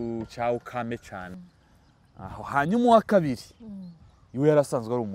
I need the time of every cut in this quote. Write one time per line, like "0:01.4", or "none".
0:01.3